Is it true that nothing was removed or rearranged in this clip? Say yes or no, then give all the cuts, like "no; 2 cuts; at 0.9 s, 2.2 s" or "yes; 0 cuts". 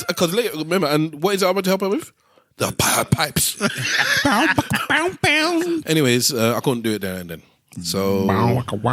no; 1 cut; at 5.8 s